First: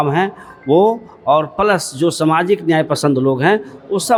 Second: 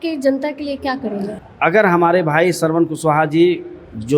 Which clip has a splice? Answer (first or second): second